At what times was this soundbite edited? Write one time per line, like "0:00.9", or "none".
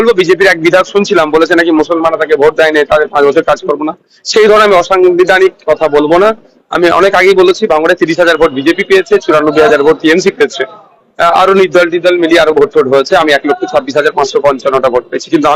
none